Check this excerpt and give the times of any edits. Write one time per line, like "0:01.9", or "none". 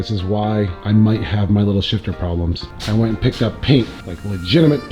0:02.6